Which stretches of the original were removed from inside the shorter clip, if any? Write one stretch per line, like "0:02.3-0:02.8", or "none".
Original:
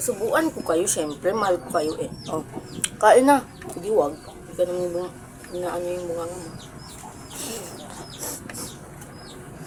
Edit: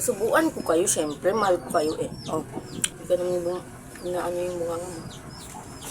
0:02.8-0:04.3

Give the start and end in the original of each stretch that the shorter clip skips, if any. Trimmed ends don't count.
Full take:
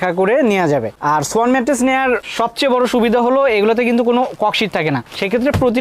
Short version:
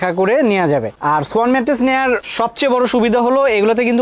none

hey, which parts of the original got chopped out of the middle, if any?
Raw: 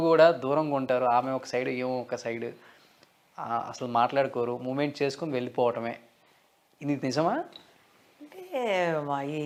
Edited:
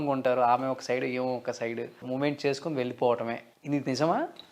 0:02.7-0:04.6
0:06.1-0:06.7

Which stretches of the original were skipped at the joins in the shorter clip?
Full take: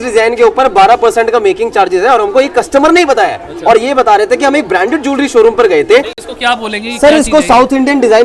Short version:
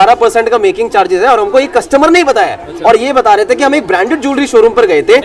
none

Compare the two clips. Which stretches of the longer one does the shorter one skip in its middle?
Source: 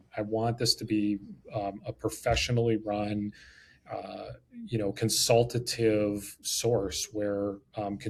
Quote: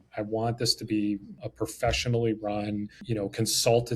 0:01.4-0:01.8
0:03.4-0:04.6

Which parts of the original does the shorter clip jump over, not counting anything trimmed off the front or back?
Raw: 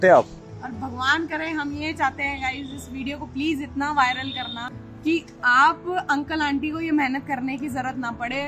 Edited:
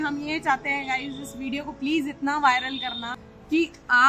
none

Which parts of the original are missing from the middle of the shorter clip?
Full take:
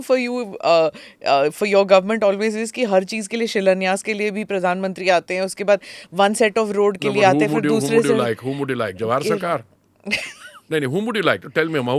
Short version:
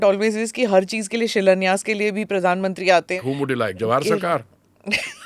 0:05.4-0:08.4

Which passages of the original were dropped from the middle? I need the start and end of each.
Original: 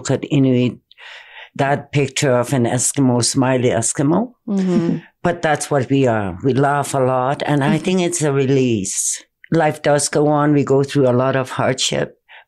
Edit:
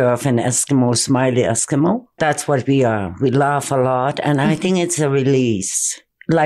0:04.4-0:05.4

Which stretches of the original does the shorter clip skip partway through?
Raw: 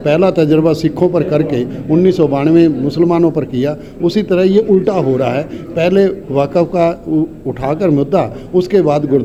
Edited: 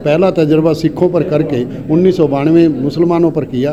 none

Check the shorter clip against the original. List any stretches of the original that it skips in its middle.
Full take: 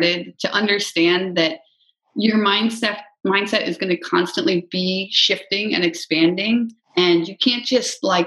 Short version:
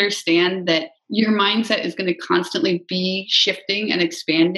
0:01.7-0:02.0
0:02.7-0:03.5

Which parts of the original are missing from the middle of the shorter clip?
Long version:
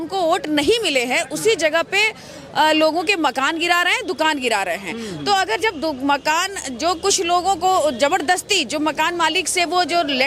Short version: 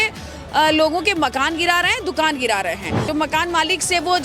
0:05.1-0:08.7

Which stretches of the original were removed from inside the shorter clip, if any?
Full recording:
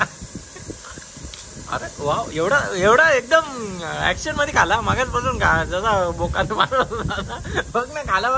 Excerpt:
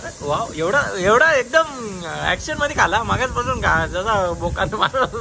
none

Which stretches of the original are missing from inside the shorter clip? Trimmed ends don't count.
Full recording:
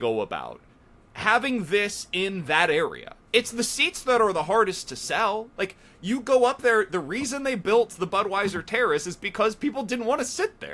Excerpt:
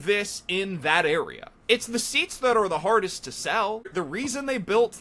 0:05.5-0:06.9

